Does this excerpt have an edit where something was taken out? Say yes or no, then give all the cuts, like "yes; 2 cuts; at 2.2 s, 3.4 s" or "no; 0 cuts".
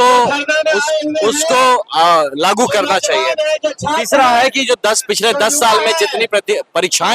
no; 0 cuts